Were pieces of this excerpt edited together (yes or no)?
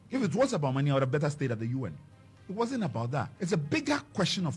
yes